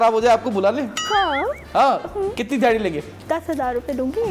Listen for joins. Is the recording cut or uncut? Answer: cut